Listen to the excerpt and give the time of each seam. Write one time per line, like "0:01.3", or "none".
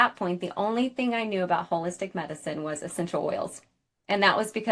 none

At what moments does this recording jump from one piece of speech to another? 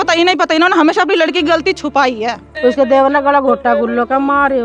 0:02.4

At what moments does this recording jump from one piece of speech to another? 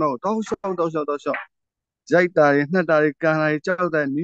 none

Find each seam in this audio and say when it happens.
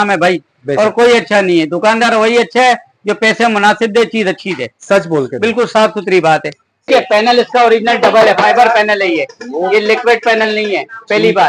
0:06.9

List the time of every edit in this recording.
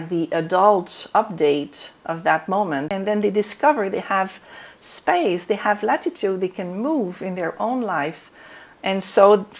0:02.9

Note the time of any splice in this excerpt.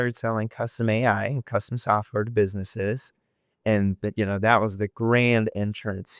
none

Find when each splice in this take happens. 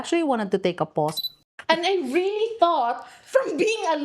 0:01.2

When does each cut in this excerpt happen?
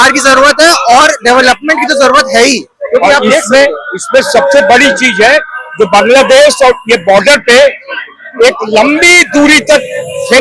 none

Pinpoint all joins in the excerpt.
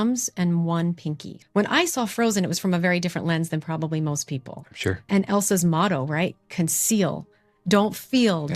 0:01.3
0:05.1

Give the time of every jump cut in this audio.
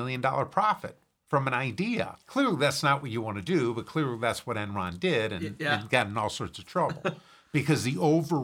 0:02.2

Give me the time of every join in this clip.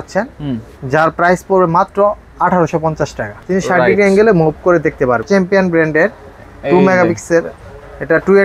0:03.3
0:05.2

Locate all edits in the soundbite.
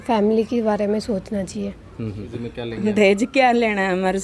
0:02.3

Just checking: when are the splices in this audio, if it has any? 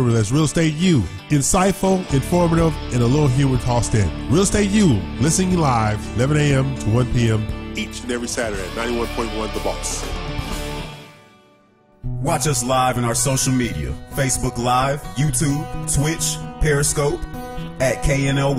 0:11.8

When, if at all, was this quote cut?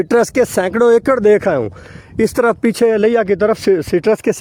none

